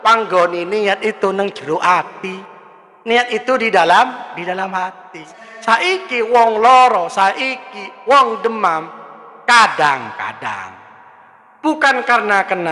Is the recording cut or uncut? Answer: cut